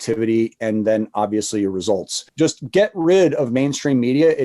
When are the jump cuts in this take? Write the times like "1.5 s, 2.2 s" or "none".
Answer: 2.2 s